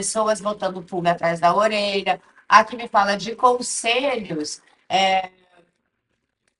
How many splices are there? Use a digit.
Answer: 0